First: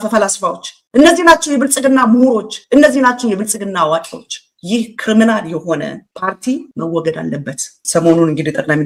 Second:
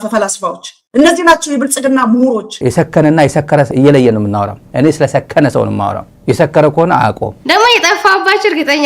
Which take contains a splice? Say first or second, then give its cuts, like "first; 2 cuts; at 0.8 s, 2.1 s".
second; 2 cuts; at 2.5 s, 7.4 s